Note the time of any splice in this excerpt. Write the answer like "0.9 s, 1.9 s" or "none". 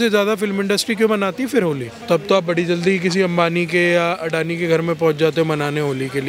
none